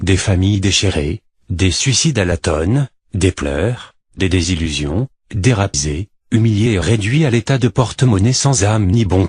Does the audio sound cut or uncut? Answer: uncut